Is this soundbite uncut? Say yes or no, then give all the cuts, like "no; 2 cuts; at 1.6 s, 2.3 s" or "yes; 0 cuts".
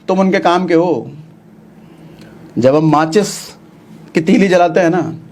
yes; 0 cuts